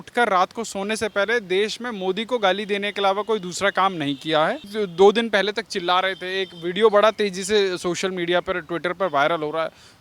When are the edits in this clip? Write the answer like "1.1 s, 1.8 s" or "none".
4.7 s